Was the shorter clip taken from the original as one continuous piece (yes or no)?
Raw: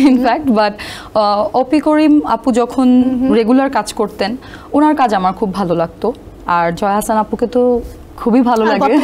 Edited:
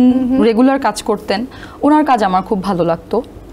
yes